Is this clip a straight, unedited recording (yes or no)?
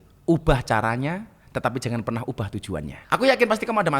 no